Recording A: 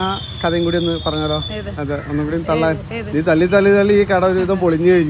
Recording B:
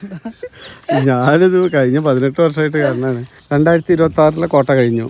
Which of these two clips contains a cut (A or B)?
B